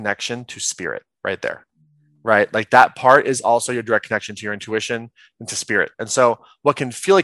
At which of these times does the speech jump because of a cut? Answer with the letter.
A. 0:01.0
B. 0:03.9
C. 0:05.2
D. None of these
D